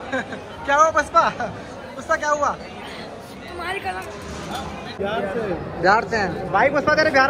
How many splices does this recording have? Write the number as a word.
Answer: one